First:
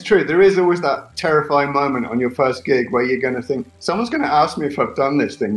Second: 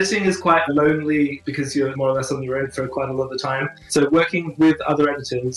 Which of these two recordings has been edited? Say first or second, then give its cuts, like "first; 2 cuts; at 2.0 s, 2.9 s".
second; 2 cuts; at 1.7 s, 3.8 s